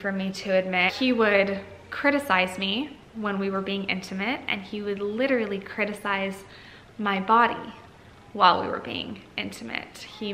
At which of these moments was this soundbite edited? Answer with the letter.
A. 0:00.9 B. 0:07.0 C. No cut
A